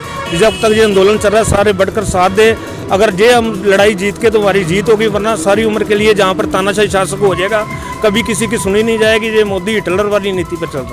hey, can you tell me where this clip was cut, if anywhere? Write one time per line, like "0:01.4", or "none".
none